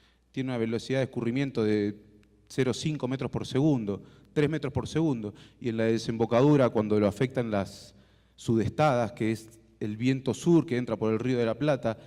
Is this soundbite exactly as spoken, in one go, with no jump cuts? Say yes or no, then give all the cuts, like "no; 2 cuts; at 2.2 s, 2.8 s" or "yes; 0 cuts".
no; 1 cut; at 1.5 s